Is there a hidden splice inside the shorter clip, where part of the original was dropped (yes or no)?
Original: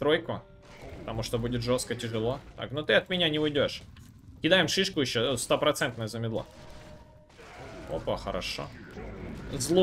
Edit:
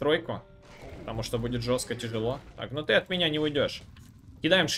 no